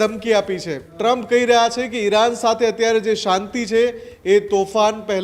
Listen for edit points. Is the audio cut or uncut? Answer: cut